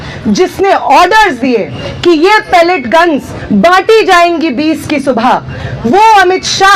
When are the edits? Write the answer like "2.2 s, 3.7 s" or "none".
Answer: 2.6 s